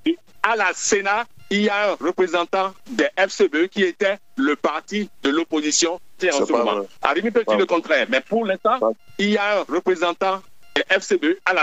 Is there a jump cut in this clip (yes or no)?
yes